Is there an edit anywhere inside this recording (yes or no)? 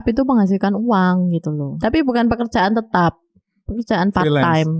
yes